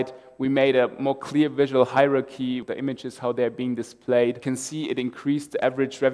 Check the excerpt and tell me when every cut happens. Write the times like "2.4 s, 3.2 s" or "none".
2.6 s, 4.4 s